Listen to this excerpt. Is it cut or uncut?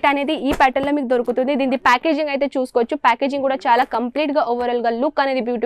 uncut